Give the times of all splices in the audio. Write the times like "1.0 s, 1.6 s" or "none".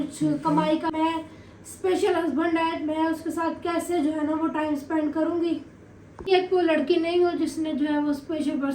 0.9 s, 6.3 s